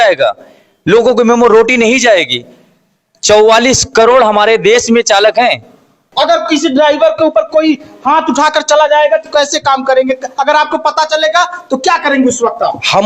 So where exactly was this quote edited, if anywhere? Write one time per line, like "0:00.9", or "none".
0:06.0